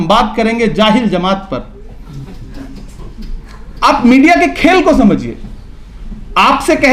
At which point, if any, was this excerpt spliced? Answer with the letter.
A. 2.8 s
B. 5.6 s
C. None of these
C